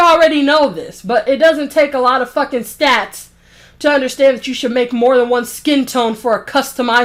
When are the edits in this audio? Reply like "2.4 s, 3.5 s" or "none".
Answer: none